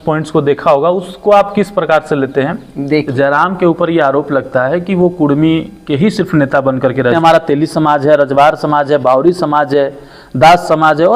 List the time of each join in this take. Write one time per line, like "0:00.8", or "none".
0:03.1
0:07.1